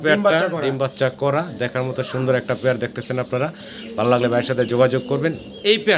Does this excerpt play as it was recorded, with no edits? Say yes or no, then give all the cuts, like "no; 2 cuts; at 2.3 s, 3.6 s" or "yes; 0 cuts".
yes; 0 cuts